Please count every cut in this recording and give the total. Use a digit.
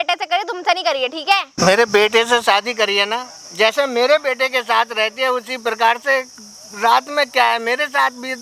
0